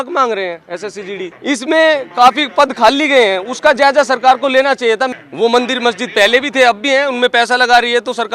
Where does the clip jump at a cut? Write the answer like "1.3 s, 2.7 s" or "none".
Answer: 1.3 s, 5.2 s